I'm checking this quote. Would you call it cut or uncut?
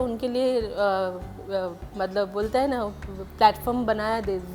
uncut